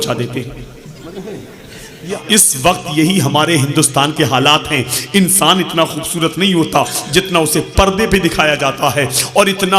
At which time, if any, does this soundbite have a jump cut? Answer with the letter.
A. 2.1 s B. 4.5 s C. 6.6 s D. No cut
A